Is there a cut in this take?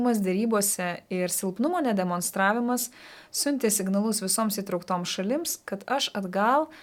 no; 0 cuts

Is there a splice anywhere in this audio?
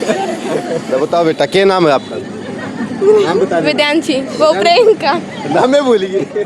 yes; 1 cut; at 1.3 s

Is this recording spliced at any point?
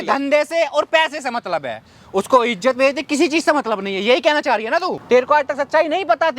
yes; 1 cut; at 5.0 s

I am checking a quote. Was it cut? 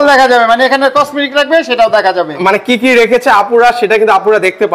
no; 0 cuts

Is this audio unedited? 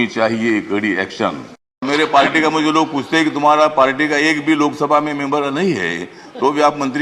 no; 1 cut; at 1.9 s

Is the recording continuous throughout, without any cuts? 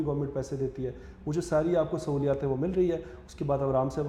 yes; 0 cuts

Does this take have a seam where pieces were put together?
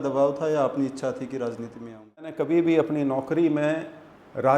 yes; 1 cut; at 2.4 s

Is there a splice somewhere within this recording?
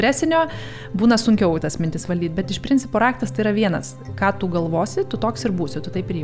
no; 0 cuts

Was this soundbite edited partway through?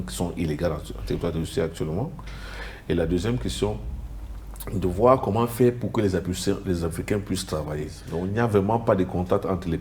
yes; 1 cut; at 8.0 s

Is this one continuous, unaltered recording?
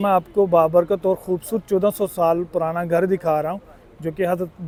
yes; 0 cuts

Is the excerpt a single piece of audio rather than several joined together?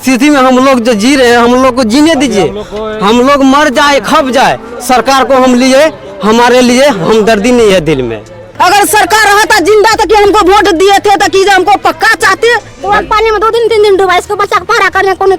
no; 2 cuts; at 8.5 s, 12.7 s

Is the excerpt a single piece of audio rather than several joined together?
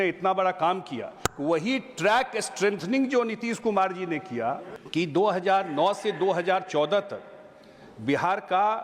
no; 2 cuts; at 1.3 s, 4.7 s

